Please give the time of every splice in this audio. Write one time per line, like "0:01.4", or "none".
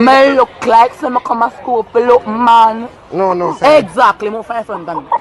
none